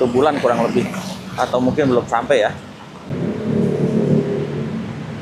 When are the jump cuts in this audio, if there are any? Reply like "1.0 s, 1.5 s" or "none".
3.1 s

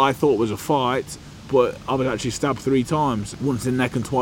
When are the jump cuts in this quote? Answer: 1.2 s, 3.3 s

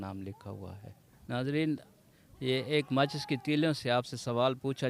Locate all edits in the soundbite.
1.2 s

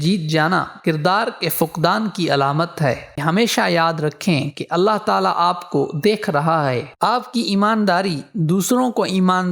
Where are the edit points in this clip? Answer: 3.1 s, 6.9 s

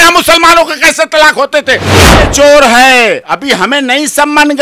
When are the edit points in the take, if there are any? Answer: 1.9 s

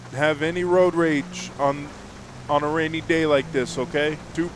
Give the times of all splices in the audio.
none

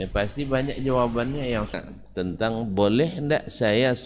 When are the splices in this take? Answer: 1.8 s

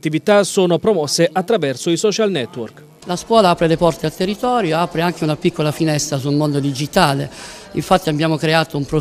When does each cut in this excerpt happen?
none

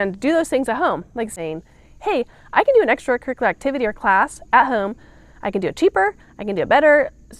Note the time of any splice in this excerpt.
1.3 s

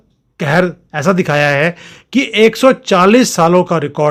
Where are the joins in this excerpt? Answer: none

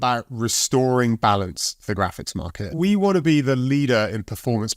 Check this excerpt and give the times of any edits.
2.7 s

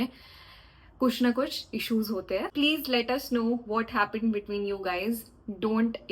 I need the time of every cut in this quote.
2.5 s

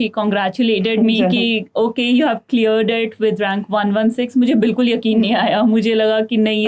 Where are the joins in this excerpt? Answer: none

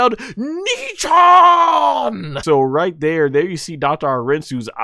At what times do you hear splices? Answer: 2.4 s

